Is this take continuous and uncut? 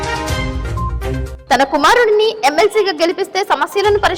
no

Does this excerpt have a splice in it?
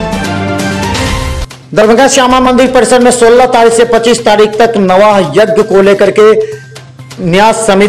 no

